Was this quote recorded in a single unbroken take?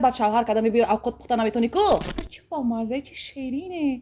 no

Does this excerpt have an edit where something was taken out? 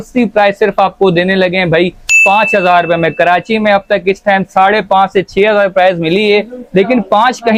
no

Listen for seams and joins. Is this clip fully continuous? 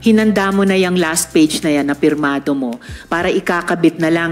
yes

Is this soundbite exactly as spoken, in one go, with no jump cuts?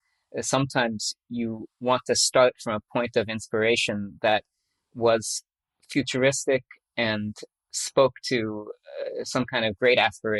yes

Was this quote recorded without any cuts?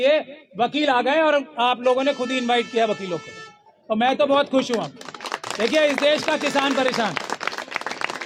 yes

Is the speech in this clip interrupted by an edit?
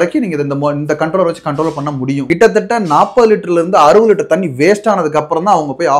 yes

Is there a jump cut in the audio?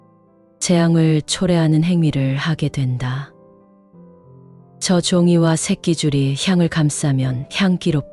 yes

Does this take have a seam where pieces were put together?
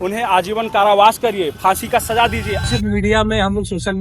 yes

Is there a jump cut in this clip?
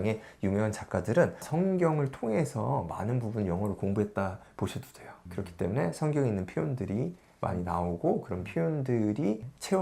no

